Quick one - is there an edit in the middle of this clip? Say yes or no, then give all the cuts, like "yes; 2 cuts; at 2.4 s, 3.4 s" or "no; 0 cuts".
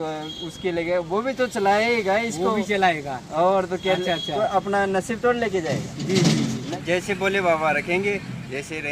yes; 1 cut; at 6.6 s